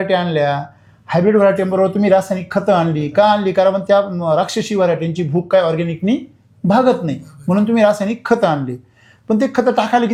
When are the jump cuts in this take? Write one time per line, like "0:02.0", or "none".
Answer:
none